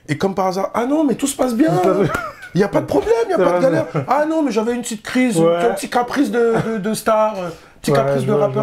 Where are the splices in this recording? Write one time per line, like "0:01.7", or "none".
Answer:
none